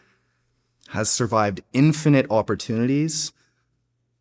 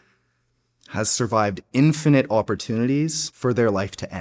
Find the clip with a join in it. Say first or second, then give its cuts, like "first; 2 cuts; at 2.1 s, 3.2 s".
second; 1 cut; at 3.3 s